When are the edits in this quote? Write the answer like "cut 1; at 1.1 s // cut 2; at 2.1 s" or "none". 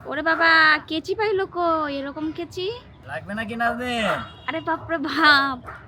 cut 1; at 2.9 s